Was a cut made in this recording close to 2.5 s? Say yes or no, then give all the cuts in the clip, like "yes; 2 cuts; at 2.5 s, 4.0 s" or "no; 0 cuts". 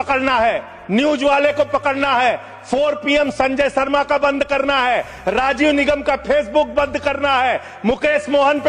no; 0 cuts